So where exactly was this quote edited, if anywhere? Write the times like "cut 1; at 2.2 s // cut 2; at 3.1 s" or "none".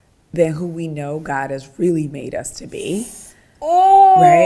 none